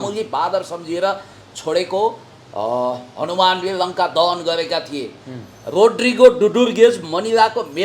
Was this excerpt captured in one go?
yes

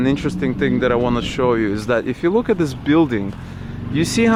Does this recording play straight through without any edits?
yes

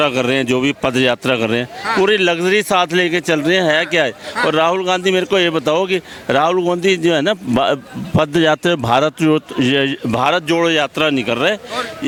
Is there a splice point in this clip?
no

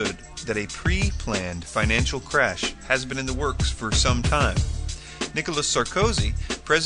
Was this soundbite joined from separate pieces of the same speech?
yes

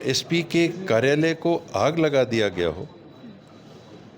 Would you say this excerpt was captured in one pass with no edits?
yes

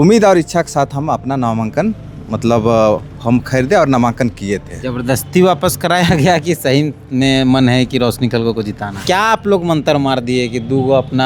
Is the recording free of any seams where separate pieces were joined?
no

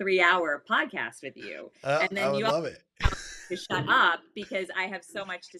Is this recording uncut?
yes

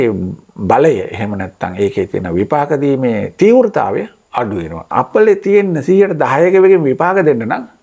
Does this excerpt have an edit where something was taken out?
yes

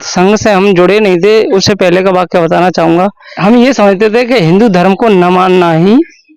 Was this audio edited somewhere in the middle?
yes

